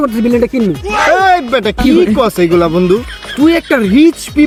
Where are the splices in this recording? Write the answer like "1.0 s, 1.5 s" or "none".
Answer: none